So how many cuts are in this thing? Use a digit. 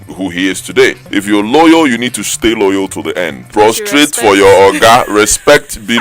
2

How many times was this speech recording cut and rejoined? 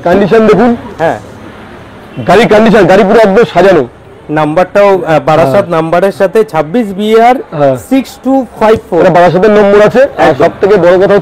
0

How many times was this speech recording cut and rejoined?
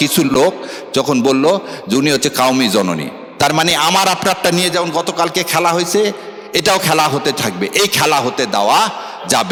0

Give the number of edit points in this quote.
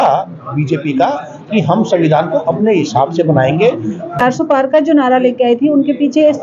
1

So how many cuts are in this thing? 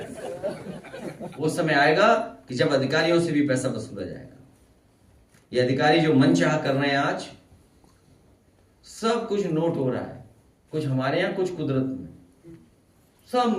1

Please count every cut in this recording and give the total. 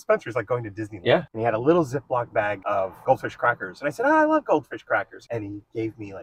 3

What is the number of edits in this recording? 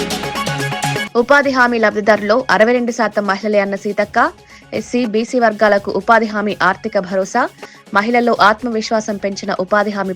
1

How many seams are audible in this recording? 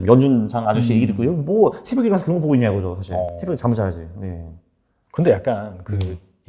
0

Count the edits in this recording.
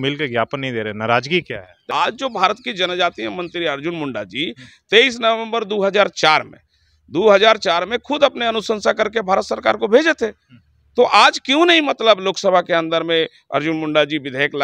1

